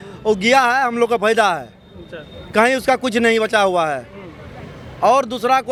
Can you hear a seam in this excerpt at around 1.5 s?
no; 0 cuts

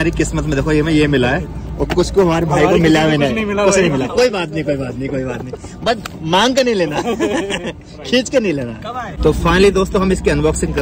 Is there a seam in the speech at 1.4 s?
no; 0 cuts

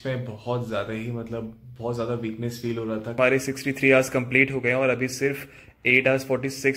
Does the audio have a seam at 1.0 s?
no; 1 cut; at 3.2 s

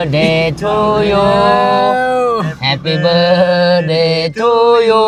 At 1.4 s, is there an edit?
no; 0 cuts

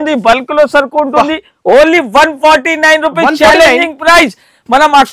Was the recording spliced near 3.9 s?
no; 0 cuts

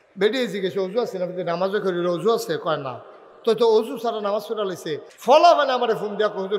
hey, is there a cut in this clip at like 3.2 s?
no; 1 cut; at 5.1 s

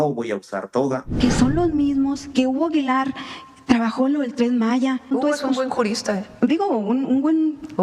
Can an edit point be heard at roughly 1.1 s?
yes; 2 cuts; at 1.1 s, 5.0 s

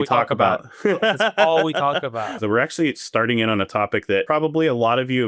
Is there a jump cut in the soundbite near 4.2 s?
yes; 2 cuts; at 2.4 s, 4.2 s

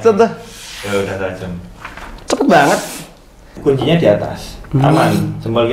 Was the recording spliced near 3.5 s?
yes; 1 cut; at 3.5 s

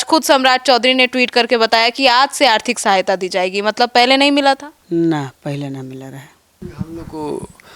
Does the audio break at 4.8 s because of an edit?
no; 1 cut; at 6.6 s

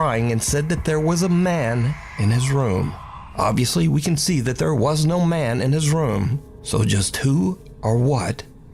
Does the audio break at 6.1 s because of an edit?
no; 0 cuts

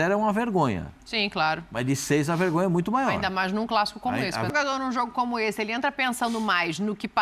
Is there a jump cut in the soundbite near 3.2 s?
no; 1 cut; at 4.5 s

